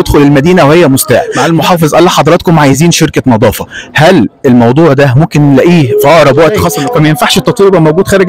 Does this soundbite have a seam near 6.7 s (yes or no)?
yes